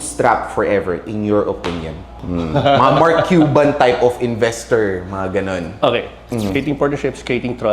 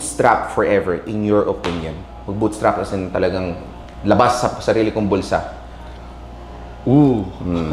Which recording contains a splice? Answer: first; 2 cuts; at 2.2 s, 6.2 s

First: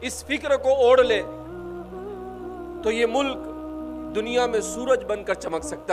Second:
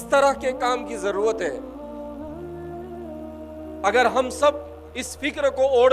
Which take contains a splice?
second; 2 cuts; at 1.6 s, 3.8 s

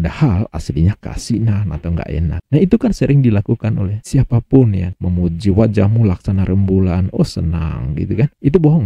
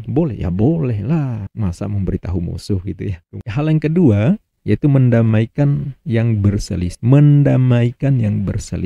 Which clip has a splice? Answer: second; 1 cut; at 3.4 s

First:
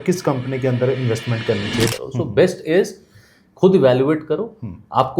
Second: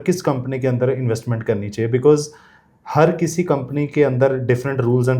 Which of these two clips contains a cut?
first; 1 cut; at 1.9 s

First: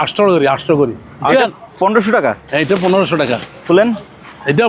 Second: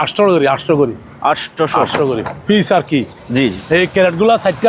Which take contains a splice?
first; 1 cut; at 1.1 s

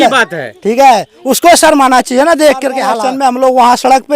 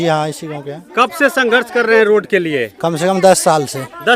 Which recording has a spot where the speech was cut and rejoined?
first; 1 cut; at 2.9 s

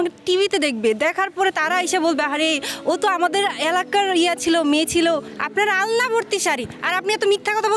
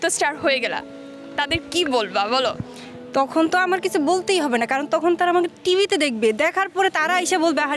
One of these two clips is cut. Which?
first; 1 cut; at 5.3 s

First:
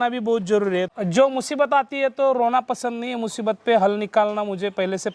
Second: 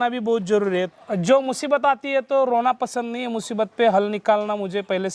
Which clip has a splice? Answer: first; 1 cut; at 0.9 s

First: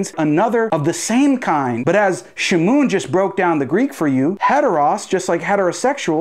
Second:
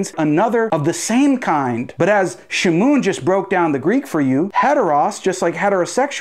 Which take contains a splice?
first; 1 cut; at 1.8 s

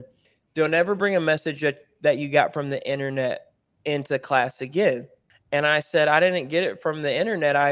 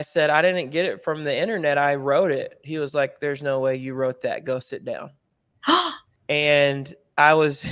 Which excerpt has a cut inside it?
second; 1 cut; at 6.1 s

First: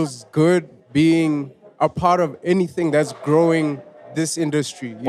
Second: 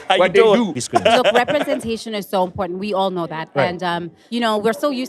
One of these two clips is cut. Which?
second; 2 cuts; at 1.3 s, 4.1 s

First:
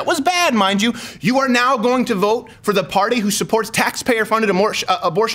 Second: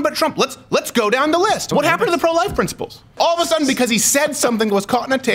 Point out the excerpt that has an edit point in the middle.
second; 2 cuts; at 1.6 s, 3.2 s

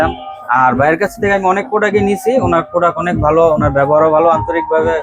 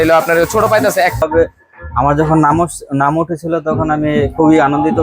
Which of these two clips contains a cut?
second; 1 cut; at 1.2 s

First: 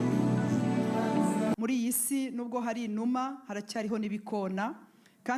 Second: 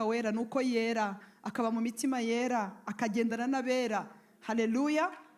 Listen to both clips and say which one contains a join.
first; 1 cut; at 1.5 s

